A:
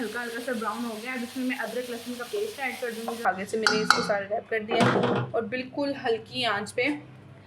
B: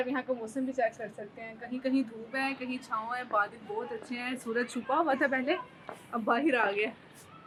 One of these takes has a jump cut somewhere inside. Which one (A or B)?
A